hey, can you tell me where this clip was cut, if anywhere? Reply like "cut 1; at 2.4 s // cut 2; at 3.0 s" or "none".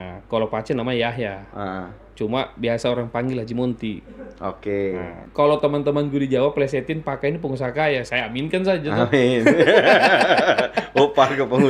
cut 1; at 5.2 s